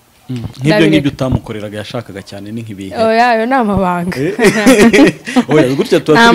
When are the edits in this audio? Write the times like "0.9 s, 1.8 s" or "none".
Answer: none